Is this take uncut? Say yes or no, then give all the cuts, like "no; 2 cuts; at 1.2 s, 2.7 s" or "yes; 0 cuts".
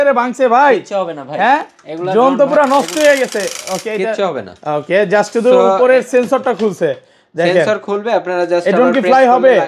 yes; 0 cuts